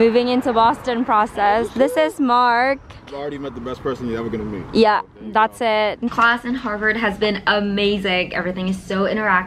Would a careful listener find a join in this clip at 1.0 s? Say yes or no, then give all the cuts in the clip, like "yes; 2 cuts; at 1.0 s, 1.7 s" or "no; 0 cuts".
no; 2 cuts; at 3.2 s, 6.1 s